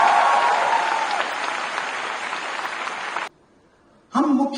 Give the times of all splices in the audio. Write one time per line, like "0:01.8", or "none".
0:03.3

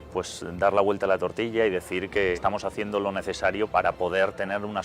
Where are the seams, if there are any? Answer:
0:02.4
0:03.7

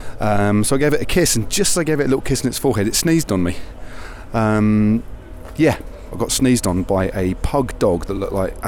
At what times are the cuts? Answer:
0:06.2

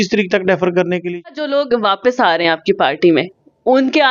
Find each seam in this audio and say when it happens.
0:01.2

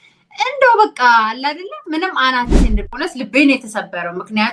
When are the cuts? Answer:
0:02.9

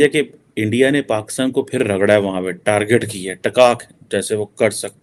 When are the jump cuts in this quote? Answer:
none

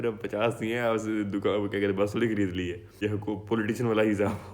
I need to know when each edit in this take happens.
0:02.8

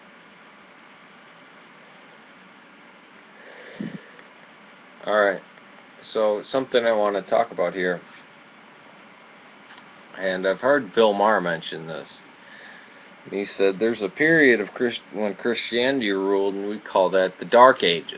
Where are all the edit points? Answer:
0:07.9

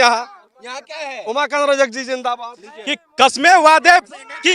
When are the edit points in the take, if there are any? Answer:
0:02.4

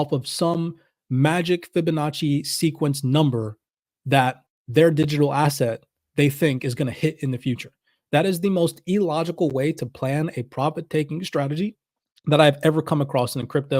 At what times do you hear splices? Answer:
0:11.8

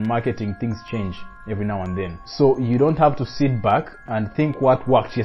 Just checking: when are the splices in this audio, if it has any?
0:02.2
0:04.0

